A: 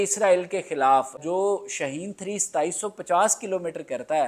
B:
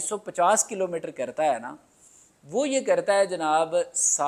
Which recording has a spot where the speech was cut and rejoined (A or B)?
A